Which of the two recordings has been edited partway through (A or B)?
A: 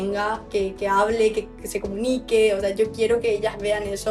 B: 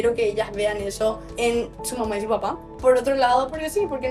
B